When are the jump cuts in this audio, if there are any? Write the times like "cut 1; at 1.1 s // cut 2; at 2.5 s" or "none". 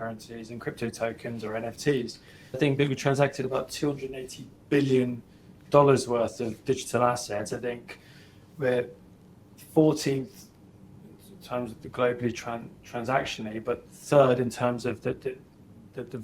cut 1; at 2.6 s